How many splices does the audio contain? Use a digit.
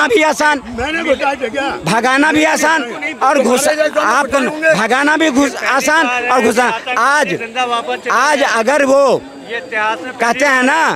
0